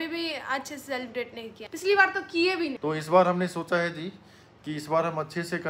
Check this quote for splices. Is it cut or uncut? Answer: cut